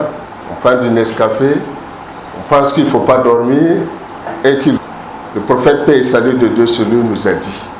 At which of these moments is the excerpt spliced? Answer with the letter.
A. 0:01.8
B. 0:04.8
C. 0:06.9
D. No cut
B